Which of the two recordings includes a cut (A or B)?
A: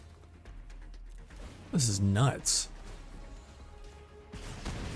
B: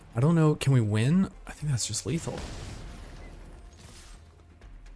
B